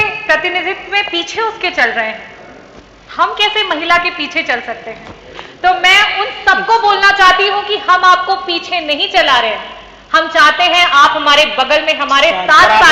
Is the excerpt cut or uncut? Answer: uncut